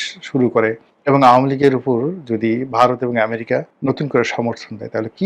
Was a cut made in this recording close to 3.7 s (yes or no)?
yes